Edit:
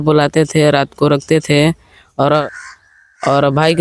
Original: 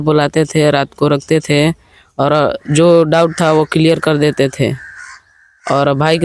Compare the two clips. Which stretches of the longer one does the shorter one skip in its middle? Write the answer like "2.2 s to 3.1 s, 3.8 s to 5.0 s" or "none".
2.4 s to 4.9 s